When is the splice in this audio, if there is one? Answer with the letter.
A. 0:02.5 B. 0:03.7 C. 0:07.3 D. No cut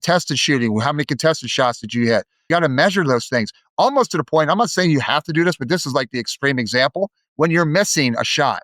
A